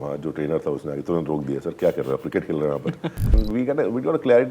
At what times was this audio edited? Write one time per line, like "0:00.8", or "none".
0:03.4